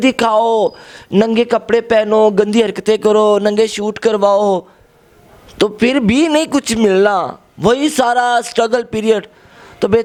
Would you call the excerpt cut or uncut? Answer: uncut